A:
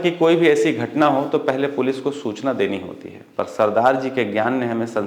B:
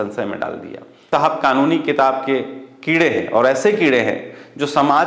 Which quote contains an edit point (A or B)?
B